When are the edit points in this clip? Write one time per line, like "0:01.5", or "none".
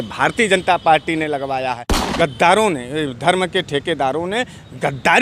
0:02.0